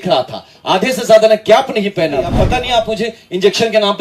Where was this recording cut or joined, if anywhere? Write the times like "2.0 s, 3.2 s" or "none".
2.4 s